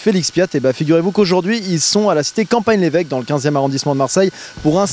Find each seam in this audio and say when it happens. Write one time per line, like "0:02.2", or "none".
0:02.2